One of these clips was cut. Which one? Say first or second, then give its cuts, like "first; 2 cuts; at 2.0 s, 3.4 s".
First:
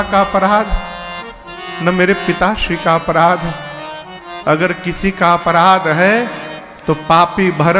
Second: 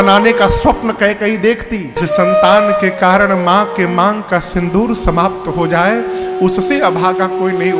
second; 1 cut; at 2.0 s